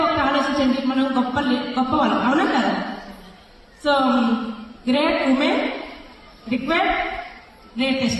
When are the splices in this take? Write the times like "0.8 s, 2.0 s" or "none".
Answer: 4.2 s